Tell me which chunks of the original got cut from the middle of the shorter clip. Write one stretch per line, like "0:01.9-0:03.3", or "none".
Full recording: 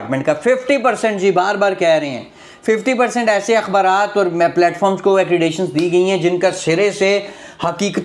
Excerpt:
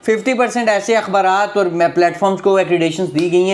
none